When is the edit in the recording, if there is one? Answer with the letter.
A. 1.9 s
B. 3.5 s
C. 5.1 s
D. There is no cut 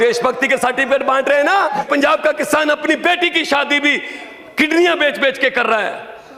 A